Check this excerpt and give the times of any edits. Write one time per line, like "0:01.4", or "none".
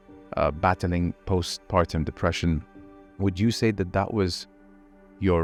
none